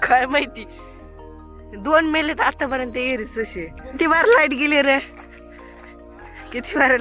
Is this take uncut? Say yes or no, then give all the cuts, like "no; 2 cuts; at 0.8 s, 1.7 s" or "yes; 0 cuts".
no; 1 cut; at 3.8 s